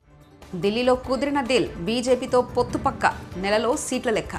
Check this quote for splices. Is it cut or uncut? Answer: uncut